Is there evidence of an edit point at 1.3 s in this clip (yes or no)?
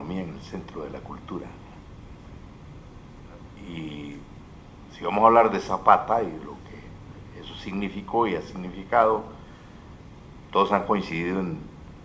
yes